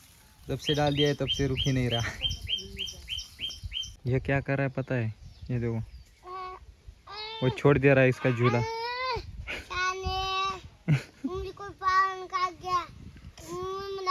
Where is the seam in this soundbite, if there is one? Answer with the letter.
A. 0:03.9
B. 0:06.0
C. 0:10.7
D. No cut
A